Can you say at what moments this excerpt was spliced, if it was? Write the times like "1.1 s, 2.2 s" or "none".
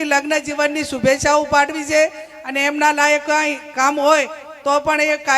none